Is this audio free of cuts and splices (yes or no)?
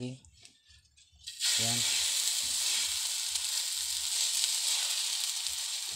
yes